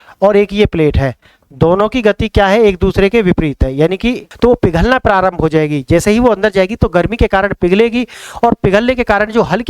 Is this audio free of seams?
no; 1 cut; at 4.3 s

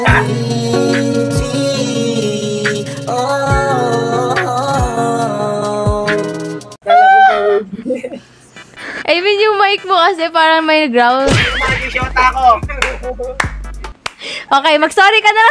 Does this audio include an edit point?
yes; 1 cut; at 11.4 s

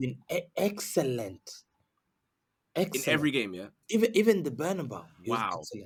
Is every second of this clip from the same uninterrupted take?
yes; 0 cuts

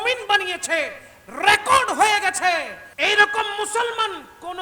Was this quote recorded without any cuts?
no; 1 cut; at 2.8 s

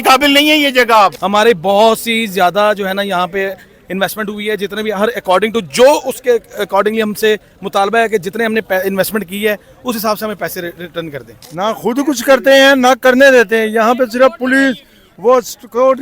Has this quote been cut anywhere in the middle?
yes; 2 cuts; at 1.2 s, 11.3 s

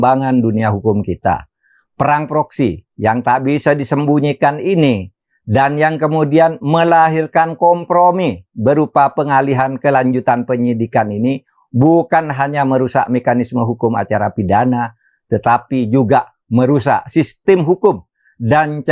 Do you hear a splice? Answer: no; 0 cuts

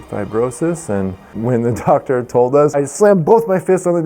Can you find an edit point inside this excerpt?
yes; 2 cuts; at 1.3 s, 2.7 s

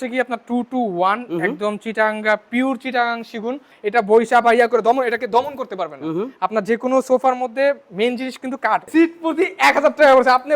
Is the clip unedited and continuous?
no; 2 cuts; at 3.7 s, 8.9 s

